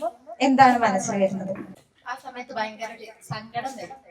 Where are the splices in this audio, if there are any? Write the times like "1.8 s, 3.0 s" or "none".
1.9 s